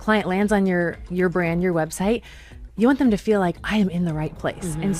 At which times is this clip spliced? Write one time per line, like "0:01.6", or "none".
none